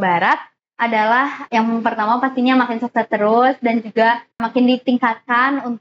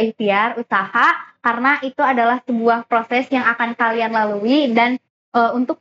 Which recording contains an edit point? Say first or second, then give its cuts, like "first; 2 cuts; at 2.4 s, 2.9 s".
first; 2 cuts; at 1.4 s, 4.4 s